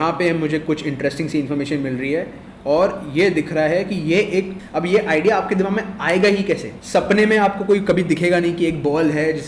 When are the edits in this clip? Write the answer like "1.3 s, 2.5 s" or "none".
4.5 s, 6.7 s